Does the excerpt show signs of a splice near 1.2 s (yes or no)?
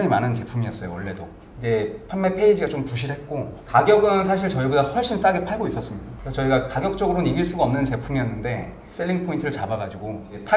no